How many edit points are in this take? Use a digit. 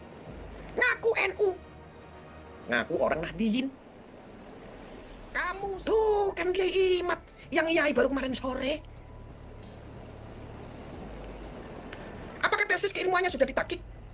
1